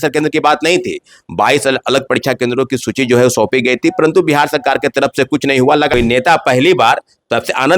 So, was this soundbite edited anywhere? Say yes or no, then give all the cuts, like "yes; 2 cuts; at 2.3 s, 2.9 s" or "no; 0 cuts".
yes; 1 cut; at 5.9 s